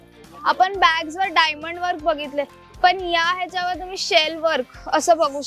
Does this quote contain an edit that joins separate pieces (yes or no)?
no